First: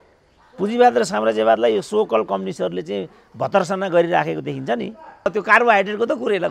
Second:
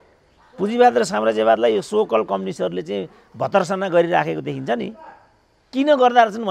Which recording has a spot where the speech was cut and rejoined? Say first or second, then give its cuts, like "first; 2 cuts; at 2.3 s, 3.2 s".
first; 1 cut; at 5.3 s